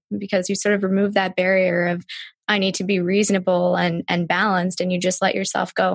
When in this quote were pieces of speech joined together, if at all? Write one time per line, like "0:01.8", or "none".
none